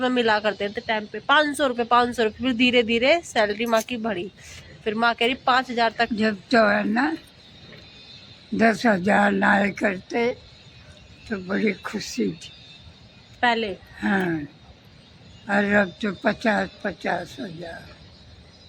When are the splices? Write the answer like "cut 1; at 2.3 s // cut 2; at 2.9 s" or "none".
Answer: none

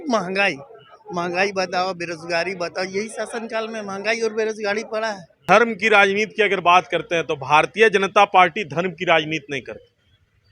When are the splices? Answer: cut 1; at 5.4 s

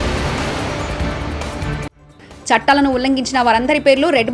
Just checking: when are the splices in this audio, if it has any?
cut 1; at 2.0 s

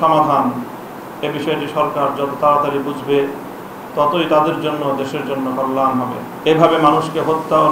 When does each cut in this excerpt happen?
cut 1; at 6.3 s

